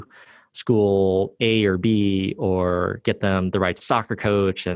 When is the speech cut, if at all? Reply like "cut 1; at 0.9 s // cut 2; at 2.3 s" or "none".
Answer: cut 1; at 3.0 s